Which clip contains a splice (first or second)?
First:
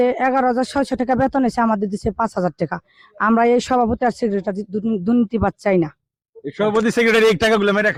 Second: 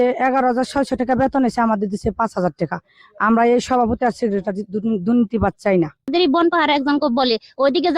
second